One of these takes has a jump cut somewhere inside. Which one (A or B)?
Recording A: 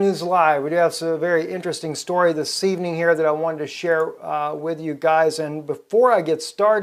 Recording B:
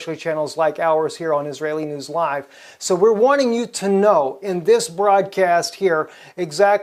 A